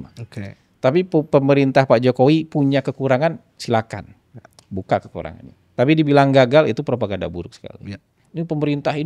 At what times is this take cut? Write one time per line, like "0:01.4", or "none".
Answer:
0:08.2

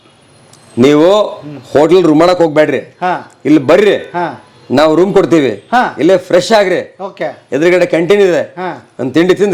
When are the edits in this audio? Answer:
none

